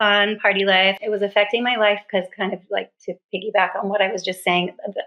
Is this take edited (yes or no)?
yes